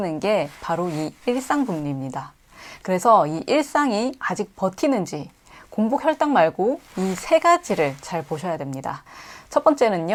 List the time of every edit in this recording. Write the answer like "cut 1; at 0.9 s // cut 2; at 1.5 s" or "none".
none